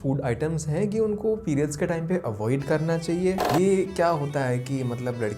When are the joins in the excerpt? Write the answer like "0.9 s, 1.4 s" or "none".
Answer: 3.5 s